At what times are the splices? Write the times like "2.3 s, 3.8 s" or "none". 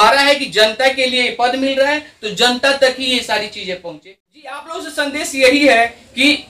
4.6 s